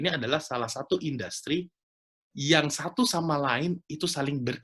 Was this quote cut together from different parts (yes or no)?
no